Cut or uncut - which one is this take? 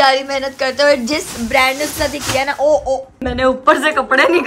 cut